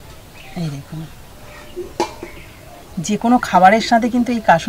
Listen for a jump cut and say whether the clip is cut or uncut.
uncut